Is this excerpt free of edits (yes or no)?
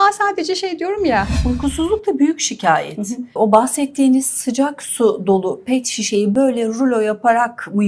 no